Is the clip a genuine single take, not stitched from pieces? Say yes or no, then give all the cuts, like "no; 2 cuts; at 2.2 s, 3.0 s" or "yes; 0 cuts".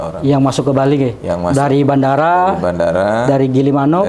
yes; 0 cuts